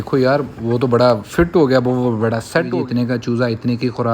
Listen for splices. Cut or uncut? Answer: cut